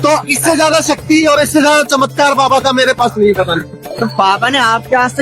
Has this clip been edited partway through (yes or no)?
yes